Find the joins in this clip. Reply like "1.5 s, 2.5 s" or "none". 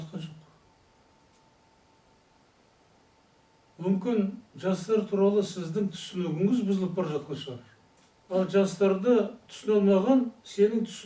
none